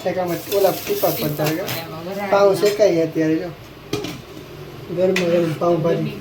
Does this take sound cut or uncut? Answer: uncut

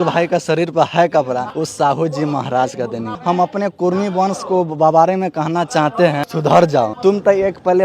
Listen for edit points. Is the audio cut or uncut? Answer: cut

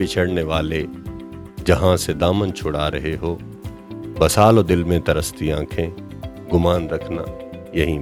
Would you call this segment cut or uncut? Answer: uncut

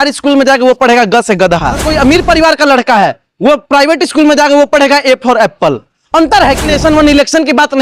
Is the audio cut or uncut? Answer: cut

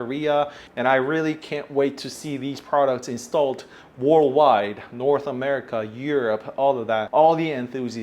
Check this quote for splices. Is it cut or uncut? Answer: cut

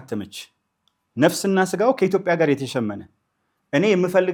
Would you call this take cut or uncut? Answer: uncut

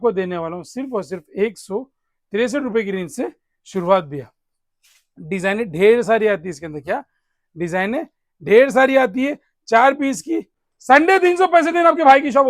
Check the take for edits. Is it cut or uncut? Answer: cut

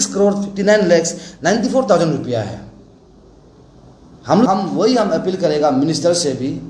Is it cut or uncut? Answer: cut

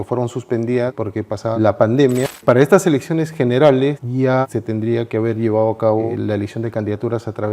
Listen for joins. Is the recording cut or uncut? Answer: cut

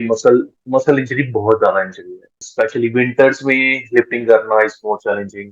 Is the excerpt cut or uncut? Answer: cut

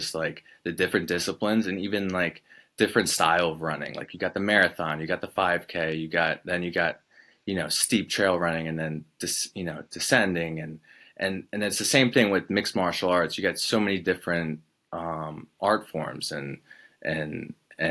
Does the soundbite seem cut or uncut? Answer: uncut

